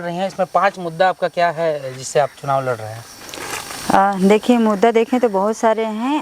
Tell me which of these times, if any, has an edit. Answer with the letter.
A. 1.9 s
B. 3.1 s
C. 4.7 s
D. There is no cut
D